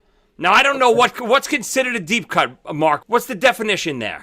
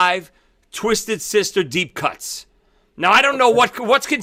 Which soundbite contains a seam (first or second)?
first